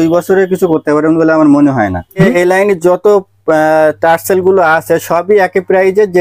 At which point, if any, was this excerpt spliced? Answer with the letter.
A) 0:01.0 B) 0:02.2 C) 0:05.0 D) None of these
B